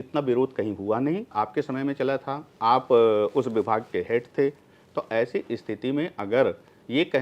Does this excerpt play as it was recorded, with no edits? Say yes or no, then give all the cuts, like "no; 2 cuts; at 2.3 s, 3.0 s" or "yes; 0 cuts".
no; 1 cut; at 1.3 s